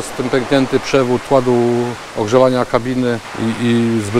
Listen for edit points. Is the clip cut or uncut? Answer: cut